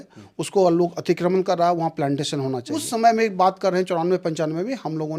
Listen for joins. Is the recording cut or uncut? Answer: cut